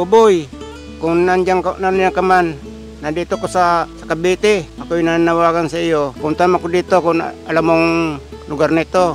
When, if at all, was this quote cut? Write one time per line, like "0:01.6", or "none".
0:04.0
0:04.8
0:06.2